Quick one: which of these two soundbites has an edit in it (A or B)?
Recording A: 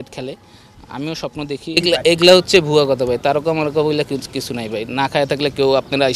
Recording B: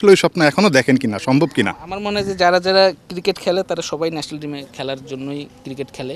A